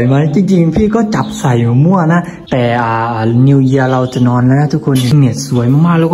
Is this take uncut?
no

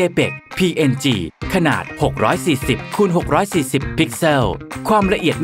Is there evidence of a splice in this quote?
no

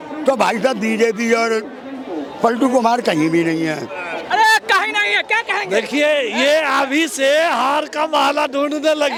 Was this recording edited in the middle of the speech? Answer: no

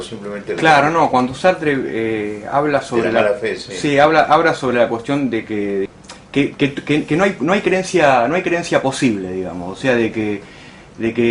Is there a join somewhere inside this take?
no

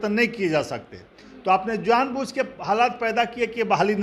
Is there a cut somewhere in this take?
no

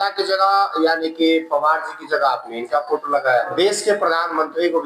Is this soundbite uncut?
no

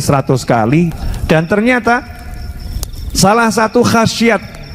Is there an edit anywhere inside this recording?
yes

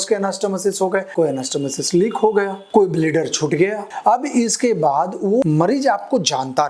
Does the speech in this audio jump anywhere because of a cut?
no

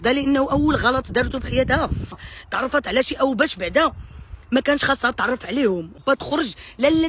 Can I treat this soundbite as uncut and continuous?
no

